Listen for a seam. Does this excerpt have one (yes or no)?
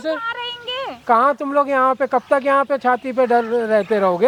no